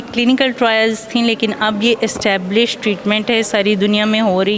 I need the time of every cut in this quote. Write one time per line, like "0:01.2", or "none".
none